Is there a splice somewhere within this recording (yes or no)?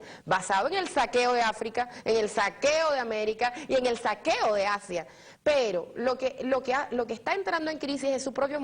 yes